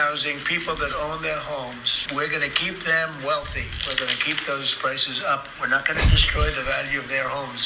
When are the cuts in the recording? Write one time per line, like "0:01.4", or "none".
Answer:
none